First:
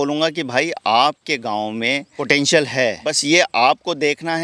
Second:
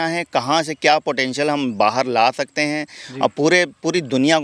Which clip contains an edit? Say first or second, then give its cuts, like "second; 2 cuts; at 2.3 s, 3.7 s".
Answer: first; 2 cuts; at 2.2 s, 3.2 s